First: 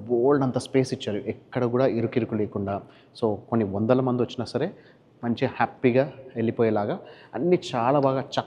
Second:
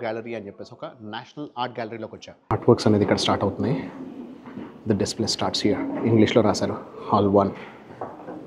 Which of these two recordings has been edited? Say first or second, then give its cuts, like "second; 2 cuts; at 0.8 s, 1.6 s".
second; 1 cut; at 2.3 s